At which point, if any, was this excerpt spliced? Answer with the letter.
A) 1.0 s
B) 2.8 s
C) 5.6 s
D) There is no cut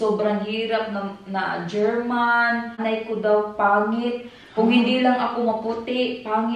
B